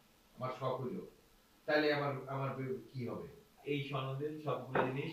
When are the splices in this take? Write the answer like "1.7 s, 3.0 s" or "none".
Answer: 3.6 s